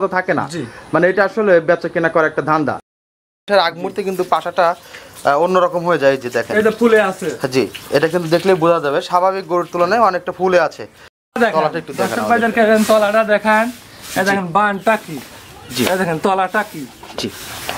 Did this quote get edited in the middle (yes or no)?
yes